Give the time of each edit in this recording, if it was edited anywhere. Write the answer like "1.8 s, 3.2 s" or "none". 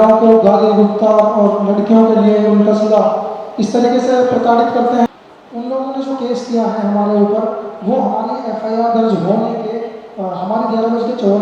5.1 s